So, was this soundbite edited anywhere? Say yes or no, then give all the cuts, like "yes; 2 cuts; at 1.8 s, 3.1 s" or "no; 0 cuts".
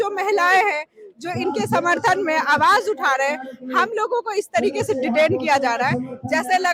no; 0 cuts